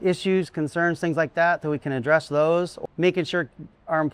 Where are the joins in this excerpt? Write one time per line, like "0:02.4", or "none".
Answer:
0:02.8